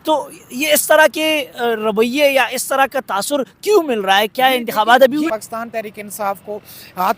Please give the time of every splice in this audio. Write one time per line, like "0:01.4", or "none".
0:05.3